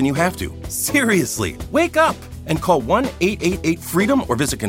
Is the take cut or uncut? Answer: uncut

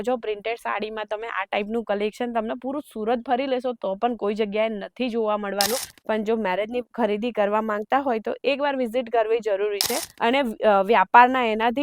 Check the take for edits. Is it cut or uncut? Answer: cut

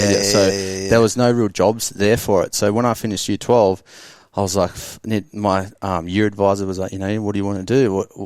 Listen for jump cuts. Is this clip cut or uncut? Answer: uncut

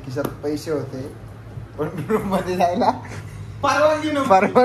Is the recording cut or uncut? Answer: uncut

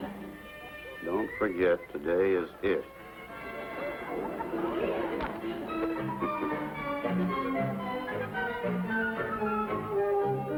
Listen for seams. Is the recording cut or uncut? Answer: uncut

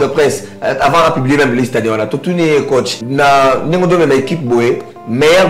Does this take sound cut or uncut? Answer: cut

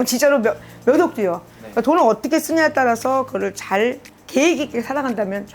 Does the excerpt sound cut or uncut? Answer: cut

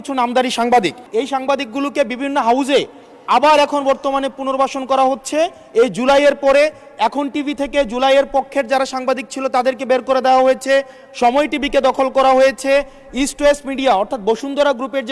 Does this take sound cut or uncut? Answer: cut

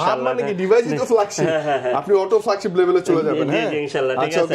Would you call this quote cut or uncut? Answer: uncut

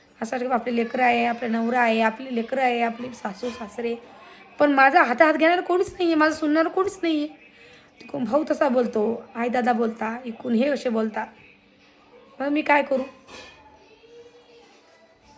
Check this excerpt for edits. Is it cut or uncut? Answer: uncut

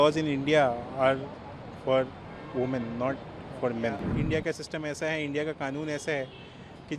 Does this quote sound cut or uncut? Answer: cut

